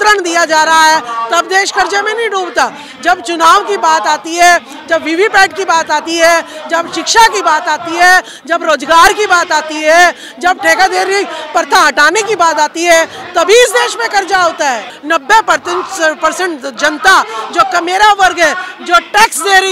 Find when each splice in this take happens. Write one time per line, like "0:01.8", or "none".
0:14.9